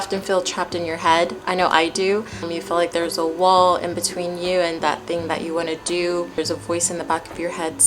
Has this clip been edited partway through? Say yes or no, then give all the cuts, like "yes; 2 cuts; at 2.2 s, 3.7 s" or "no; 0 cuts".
yes; 2 cuts; at 2.5 s, 6.4 s